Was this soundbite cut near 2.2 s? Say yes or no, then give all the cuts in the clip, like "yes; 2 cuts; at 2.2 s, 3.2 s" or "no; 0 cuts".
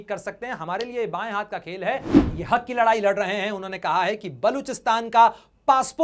yes; 1 cut; at 2.2 s